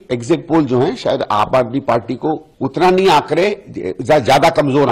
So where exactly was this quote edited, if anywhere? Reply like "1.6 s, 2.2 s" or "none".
2.5 s